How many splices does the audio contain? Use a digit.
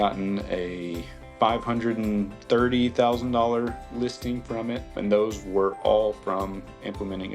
1